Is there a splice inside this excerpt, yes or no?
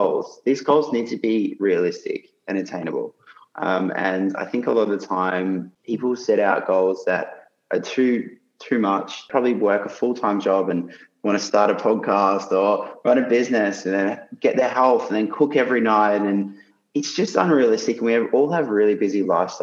yes